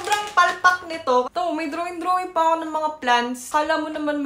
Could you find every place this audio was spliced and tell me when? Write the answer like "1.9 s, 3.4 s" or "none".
1.3 s, 3.4 s

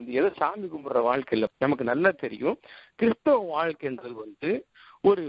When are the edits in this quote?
1.5 s

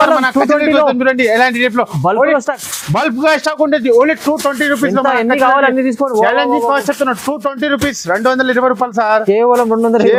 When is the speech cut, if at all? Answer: none

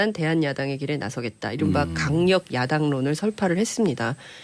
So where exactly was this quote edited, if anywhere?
2.2 s

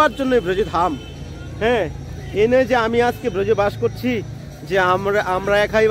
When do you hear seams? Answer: none

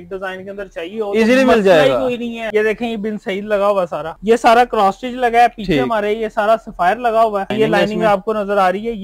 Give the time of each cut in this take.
2.4 s, 4.1 s, 7.5 s

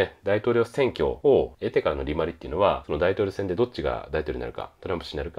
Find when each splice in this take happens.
1.3 s, 2.8 s

